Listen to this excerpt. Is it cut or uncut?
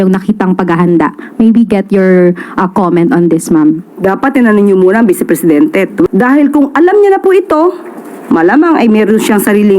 cut